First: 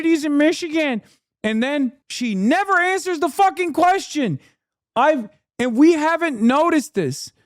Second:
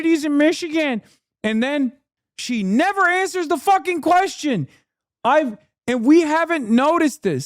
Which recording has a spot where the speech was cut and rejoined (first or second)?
first